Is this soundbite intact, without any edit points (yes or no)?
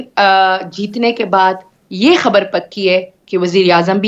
yes